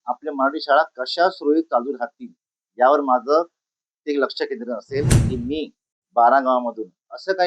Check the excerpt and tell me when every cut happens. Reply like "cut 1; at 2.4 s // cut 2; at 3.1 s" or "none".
cut 1; at 5.2 s